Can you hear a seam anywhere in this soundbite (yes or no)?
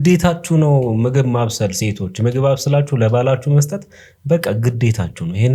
no